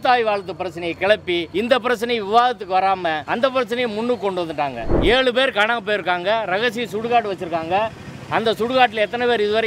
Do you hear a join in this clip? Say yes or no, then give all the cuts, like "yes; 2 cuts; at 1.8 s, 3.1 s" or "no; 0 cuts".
yes; 3 cuts; at 1.5 s, 3.2 s, 4.9 s